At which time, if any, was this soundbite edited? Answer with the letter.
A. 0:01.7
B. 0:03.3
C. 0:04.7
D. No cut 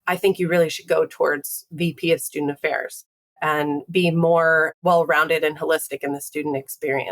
C